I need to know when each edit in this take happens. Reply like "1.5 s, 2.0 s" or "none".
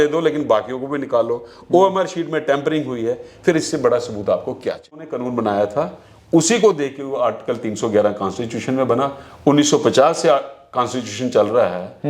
5.1 s